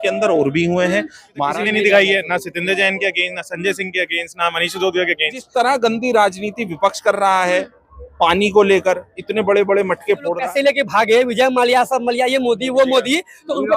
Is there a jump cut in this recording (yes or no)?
yes